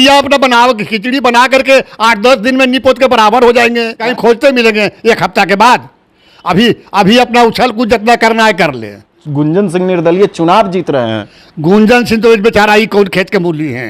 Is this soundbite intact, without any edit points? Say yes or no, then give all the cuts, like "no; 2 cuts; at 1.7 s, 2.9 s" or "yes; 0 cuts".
no; 2 cuts; at 4.1 s, 9.2 s